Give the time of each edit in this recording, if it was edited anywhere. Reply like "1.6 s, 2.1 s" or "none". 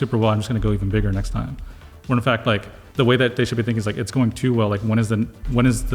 2.8 s